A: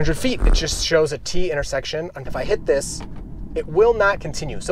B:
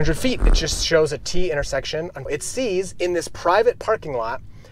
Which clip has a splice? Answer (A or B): A